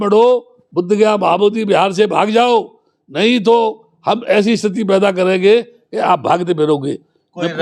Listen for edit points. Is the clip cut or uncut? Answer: uncut